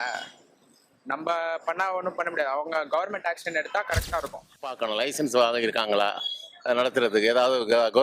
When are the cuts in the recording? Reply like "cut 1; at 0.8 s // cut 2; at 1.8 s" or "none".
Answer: cut 1; at 4.8 s